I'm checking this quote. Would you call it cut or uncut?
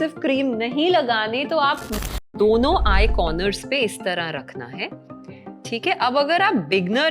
cut